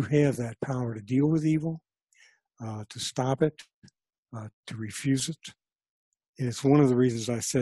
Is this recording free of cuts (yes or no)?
yes